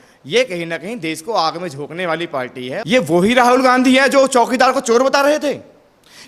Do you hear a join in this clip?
yes; 1 cut; at 2.8 s

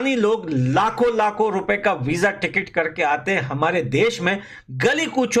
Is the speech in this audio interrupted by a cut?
no; 0 cuts

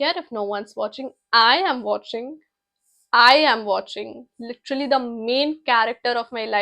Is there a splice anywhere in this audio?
no; 0 cuts

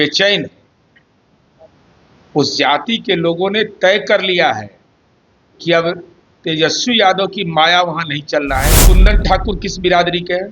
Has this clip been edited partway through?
yes; 1 cut; at 8.9 s

